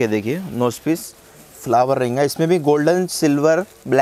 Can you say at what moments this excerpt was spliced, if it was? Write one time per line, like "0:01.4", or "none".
none